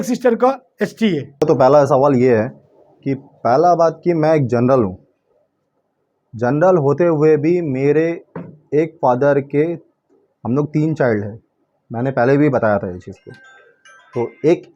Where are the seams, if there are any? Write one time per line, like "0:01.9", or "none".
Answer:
0:01.3